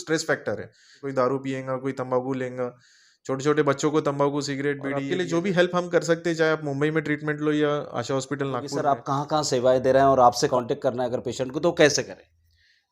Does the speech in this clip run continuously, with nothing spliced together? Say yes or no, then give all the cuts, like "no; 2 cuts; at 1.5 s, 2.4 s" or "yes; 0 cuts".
no; 4 cuts; at 1.0 s, 4.9 s, 8.7 s, 10.5 s